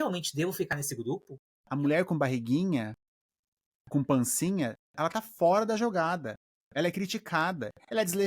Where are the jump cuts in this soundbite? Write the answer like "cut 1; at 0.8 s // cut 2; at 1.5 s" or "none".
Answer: cut 1; at 1.1 s